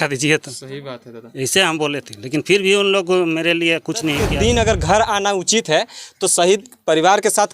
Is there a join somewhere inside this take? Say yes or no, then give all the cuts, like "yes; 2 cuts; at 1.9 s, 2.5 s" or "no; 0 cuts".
yes; 1 cut; at 4.2 s